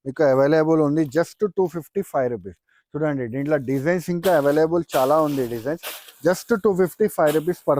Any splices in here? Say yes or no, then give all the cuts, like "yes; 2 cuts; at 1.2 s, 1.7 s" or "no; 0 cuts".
no; 0 cuts